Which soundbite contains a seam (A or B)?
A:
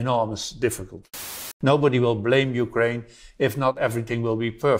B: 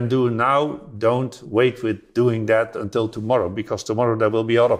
A